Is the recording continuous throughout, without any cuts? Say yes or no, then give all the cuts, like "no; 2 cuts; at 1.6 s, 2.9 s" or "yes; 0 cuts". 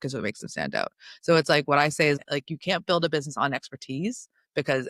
no; 1 cut; at 2.2 s